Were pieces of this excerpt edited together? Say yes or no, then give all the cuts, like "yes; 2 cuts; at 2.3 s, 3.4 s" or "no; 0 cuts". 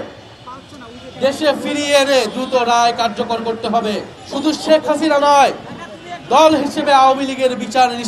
yes; 1 cut; at 4.2 s